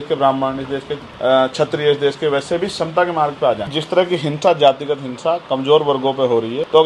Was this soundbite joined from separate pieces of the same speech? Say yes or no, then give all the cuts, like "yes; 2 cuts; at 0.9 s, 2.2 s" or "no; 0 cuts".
yes; 1 cut; at 3.7 s